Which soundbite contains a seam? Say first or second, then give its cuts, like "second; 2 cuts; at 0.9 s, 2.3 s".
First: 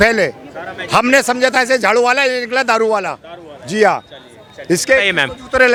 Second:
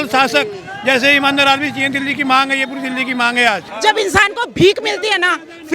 second; 1 cut; at 3.7 s